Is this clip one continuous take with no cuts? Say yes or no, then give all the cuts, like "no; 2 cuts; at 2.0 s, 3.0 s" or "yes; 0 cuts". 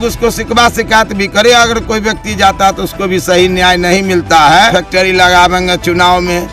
no; 1 cut; at 4.7 s